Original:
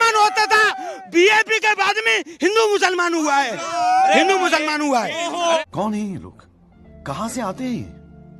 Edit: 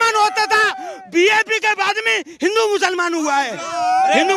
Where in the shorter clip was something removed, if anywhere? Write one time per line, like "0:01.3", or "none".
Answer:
none

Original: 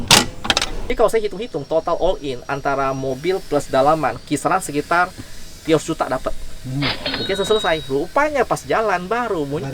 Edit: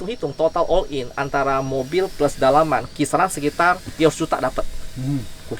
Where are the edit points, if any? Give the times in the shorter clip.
0:03.9

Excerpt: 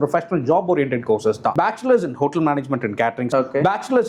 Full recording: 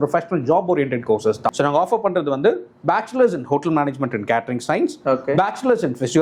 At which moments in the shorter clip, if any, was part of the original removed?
0:01.4
0:03.2

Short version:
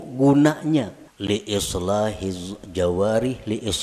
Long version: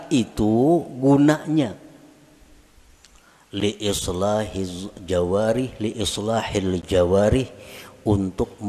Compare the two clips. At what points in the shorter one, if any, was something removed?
0:01.0

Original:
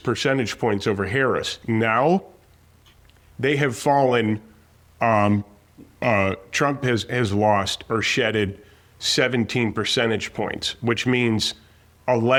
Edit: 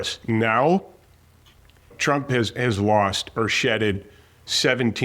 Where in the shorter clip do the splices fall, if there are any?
0:01.9

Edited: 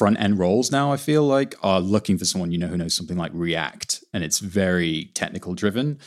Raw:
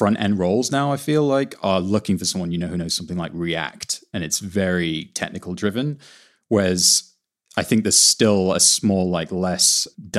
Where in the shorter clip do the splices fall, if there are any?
none

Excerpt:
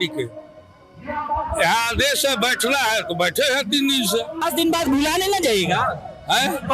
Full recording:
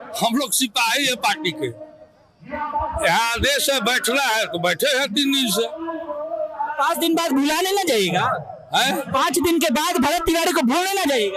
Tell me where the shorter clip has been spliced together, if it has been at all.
0:04.4

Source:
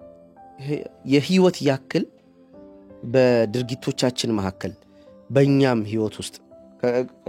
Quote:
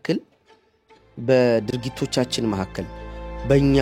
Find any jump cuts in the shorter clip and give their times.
none

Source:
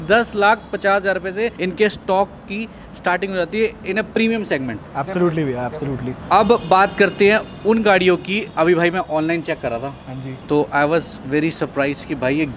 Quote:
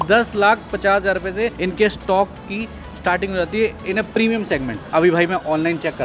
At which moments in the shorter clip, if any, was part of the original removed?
0:04.8

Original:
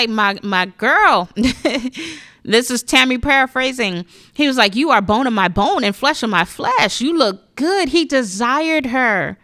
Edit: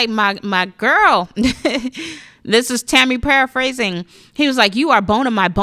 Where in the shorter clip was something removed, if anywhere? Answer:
none

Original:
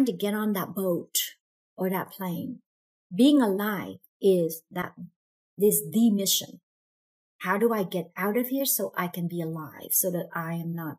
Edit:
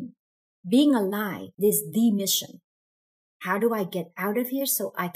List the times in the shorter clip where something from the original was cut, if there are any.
0:01.4

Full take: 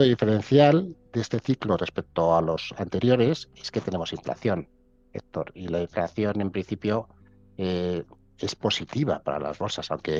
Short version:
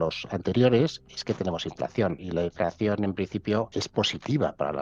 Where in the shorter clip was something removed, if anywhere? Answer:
0:02.2
0:03.7

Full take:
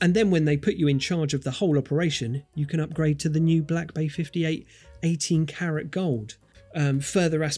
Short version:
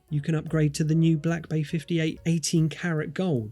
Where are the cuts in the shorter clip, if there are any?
0:02.2

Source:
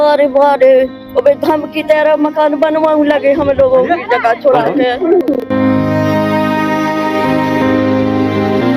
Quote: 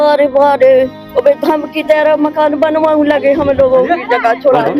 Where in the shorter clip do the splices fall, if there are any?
none

